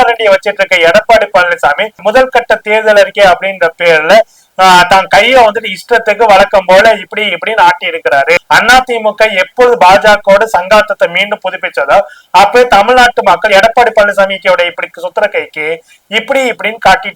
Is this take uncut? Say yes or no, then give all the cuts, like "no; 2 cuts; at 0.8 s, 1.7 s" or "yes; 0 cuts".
no; 1 cut; at 8.4 s